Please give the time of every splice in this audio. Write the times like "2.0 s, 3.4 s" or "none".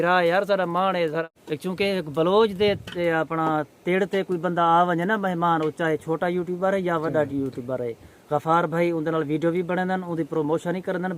1.3 s